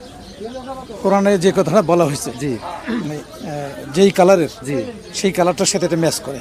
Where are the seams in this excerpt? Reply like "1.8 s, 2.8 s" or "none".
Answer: none